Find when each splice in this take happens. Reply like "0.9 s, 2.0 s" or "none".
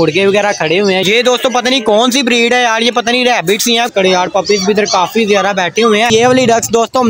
1.0 s, 3.9 s, 6.1 s